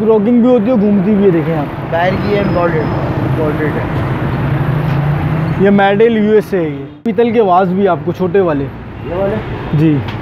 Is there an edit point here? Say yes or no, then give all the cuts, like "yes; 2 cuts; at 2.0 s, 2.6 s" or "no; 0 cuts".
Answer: yes; 1 cut; at 7.0 s